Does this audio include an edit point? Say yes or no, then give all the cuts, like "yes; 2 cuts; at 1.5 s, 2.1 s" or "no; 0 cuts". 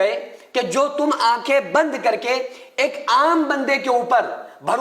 no; 0 cuts